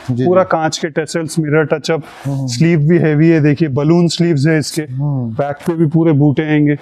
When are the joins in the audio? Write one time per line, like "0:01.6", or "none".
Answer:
none